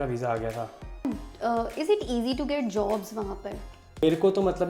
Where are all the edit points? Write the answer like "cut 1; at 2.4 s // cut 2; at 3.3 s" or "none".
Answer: cut 1; at 1.1 s // cut 2; at 4.0 s